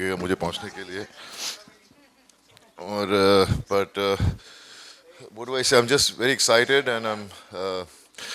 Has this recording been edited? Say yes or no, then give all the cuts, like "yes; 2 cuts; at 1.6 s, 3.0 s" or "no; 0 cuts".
no; 0 cuts